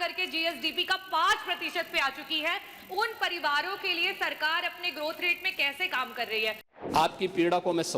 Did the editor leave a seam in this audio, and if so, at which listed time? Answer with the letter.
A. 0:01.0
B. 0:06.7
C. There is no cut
B